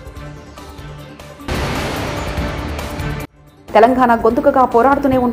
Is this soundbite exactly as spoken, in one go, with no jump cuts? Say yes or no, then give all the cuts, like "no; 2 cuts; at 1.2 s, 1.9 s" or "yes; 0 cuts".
no; 2 cuts; at 1.5 s, 3.4 s